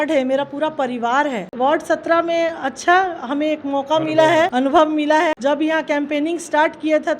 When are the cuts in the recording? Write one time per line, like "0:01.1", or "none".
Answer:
0:01.5
0:04.5
0:05.4

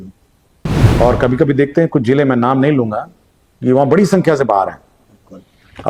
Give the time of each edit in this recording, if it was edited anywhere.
none

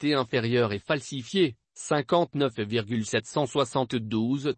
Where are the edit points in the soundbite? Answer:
0:01.6

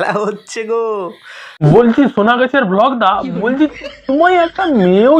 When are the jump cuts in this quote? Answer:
0:01.5

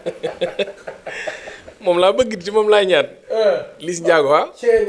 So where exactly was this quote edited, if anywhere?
none

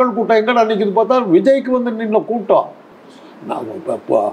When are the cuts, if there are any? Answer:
none

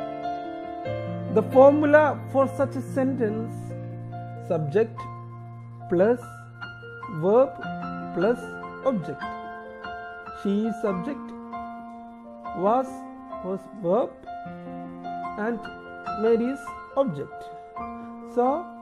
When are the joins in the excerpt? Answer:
0:01.3

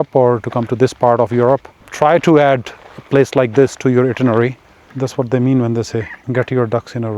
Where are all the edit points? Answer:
0:01.8
0:04.8
0:06.2

